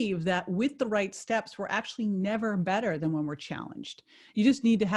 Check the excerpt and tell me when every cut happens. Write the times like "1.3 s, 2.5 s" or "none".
none